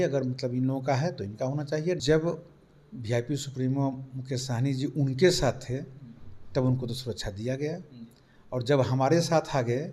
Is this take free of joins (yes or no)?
no